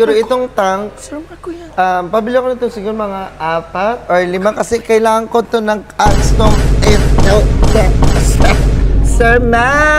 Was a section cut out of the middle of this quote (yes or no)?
no